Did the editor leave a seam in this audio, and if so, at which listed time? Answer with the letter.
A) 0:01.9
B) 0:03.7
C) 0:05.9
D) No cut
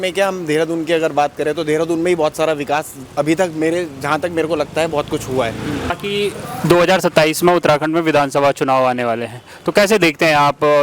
C